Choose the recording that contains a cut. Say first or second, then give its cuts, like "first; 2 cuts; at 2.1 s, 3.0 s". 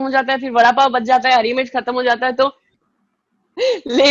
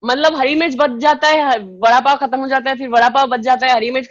first; 1 cut; at 2.7 s